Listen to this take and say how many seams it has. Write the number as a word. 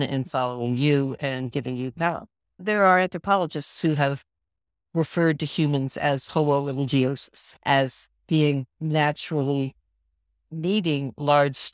two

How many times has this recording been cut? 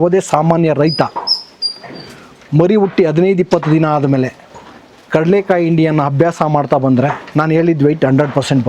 zero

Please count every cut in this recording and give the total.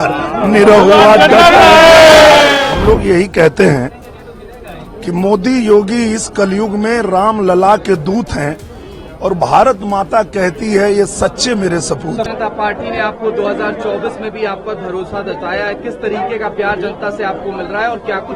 two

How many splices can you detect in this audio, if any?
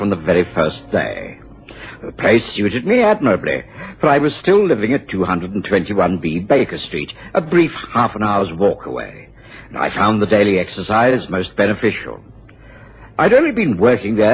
one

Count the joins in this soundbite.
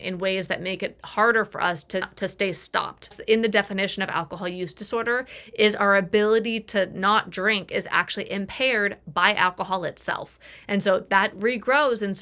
two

